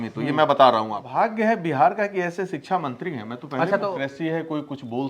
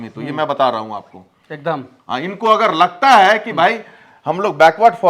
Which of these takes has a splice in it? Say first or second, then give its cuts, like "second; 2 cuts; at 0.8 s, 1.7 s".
first; 2 cuts; at 1.1 s, 3.8 s